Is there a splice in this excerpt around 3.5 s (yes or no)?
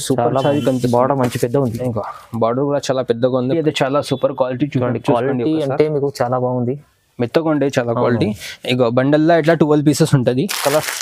yes